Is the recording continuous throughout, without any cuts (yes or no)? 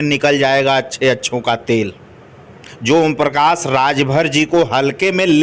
yes